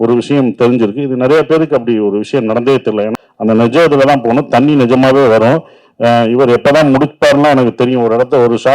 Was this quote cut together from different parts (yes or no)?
yes